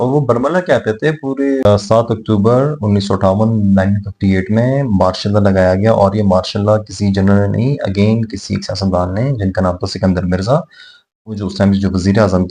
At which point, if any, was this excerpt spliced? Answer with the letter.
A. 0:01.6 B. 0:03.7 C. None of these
A